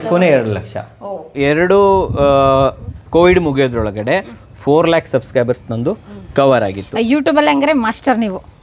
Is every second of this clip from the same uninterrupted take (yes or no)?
no